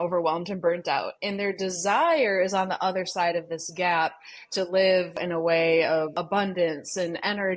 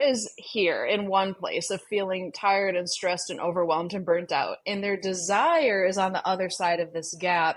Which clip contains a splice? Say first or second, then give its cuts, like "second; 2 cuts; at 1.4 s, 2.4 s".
first; 2 cuts; at 5.2 s, 6.2 s